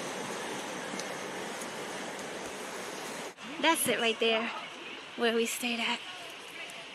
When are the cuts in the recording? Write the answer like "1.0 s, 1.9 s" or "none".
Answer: 3.4 s

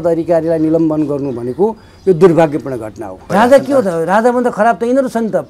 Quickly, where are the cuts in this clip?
3.3 s

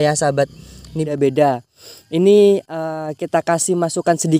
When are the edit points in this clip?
1.1 s

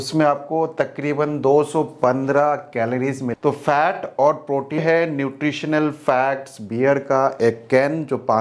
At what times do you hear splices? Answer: 3.3 s, 4.8 s

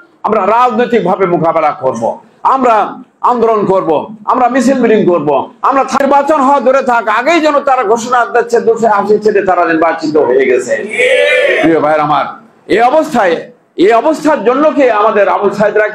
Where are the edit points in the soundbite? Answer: 6.2 s

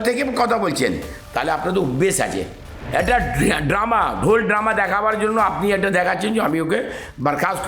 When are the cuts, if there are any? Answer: 2.7 s

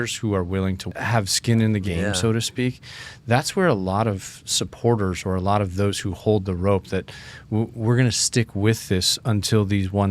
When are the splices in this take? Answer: 0.8 s, 1.8 s

